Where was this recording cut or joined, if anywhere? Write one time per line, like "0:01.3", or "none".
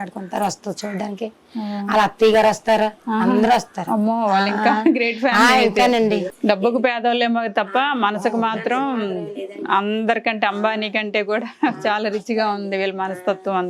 0:06.3